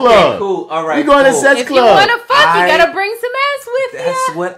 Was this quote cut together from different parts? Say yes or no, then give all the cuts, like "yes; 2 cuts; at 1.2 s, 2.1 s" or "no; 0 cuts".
no; 0 cuts